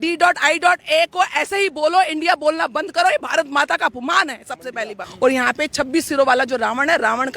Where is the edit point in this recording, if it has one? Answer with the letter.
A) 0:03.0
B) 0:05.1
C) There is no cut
B